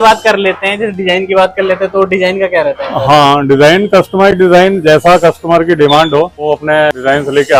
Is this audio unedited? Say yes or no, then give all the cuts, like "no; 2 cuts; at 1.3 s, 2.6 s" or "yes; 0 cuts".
yes; 0 cuts